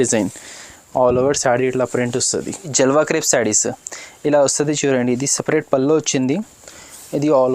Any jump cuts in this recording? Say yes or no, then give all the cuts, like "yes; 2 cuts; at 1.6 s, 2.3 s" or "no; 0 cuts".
yes; 1 cut; at 2.7 s